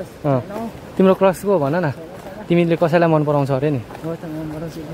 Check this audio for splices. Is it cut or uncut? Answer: uncut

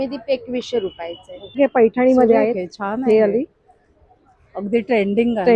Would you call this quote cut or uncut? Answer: cut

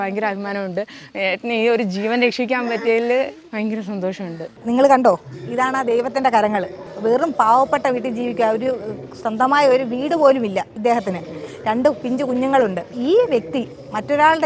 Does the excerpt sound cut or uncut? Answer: uncut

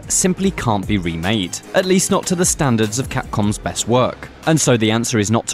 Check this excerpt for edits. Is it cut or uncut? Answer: cut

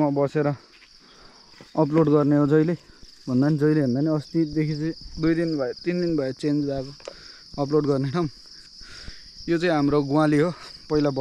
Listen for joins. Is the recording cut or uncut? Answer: uncut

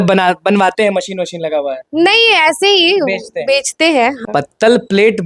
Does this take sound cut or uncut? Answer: cut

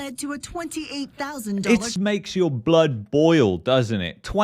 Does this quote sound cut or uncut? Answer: cut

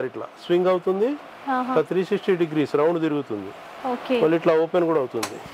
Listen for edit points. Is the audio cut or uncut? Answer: uncut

